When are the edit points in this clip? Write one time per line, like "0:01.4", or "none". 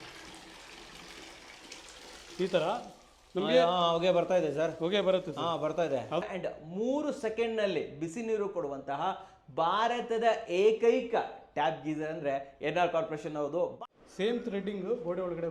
0:06.2
0:13.8